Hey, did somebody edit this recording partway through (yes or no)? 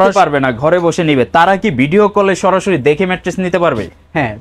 no